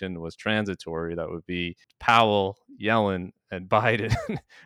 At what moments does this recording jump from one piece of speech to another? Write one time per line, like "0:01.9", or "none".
0:01.8